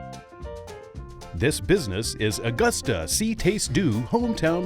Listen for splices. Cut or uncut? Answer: cut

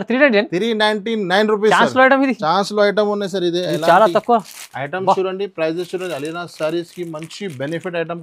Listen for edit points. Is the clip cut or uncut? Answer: uncut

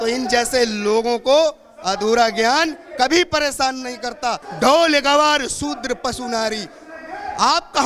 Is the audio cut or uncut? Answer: cut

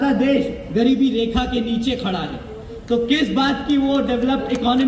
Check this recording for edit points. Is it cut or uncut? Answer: uncut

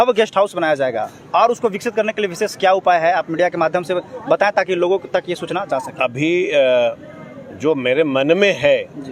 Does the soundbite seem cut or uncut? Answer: uncut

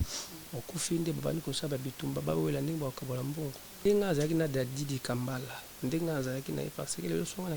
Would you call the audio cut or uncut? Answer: cut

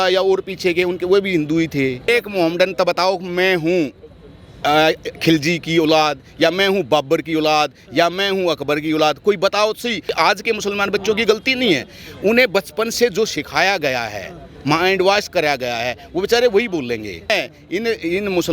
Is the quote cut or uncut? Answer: cut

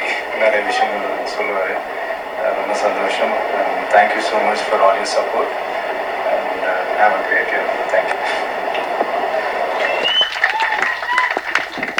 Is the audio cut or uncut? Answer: uncut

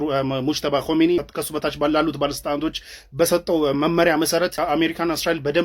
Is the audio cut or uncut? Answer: cut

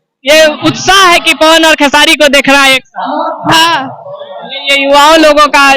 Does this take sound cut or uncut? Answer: uncut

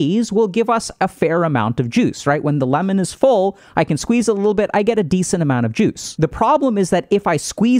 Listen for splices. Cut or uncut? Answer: cut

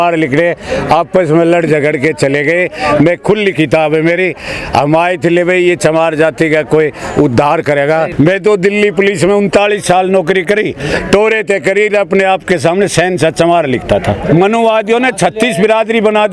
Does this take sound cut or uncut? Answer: cut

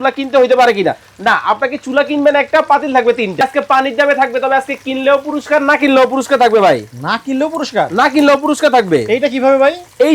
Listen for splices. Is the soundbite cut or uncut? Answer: cut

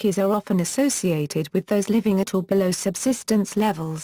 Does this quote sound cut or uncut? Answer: uncut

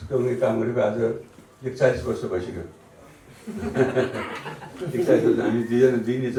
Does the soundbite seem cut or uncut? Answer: uncut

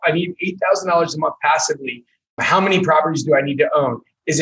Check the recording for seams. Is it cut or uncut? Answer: uncut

